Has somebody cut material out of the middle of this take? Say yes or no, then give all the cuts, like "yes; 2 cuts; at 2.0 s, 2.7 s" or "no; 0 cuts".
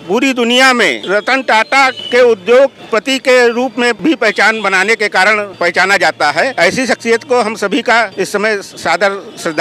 yes; 7 cuts; at 1.0 s, 2.0 s, 2.8 s, 4.0 s, 5.5 s, 6.5 s, 8.1 s